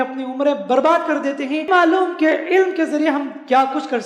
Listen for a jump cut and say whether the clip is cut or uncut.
cut